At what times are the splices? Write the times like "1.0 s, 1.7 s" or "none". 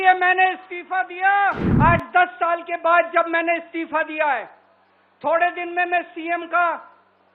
1.7 s